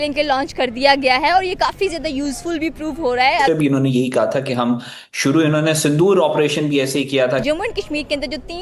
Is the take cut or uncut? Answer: cut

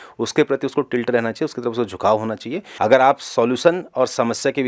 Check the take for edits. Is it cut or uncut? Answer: cut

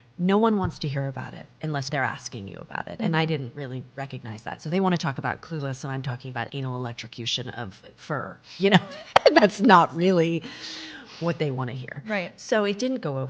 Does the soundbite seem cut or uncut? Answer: cut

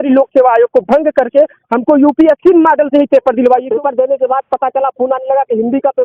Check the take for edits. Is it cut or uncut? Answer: cut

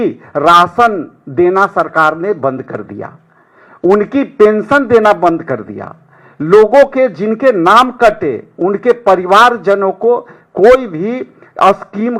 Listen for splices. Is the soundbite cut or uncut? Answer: uncut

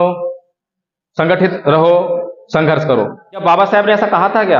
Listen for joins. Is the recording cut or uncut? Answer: cut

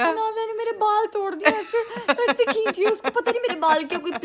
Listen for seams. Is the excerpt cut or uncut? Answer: uncut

